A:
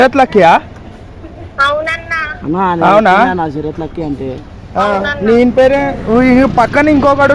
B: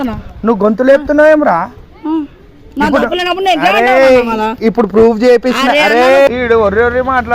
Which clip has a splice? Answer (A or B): B